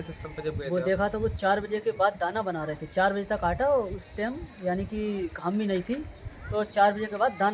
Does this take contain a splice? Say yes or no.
no